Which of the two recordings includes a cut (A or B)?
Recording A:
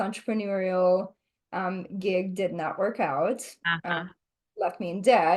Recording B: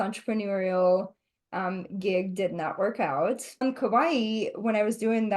B